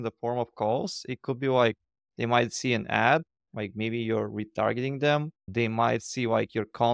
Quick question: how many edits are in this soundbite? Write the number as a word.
zero